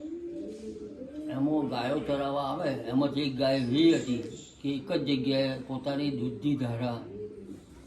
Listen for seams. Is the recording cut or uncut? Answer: uncut